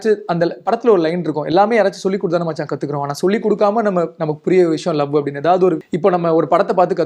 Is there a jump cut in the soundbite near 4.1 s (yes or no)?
no